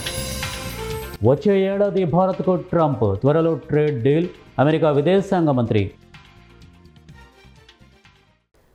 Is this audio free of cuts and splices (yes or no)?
yes